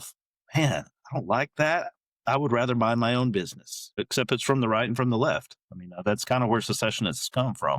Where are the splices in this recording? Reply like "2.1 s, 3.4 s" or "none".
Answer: 4.0 s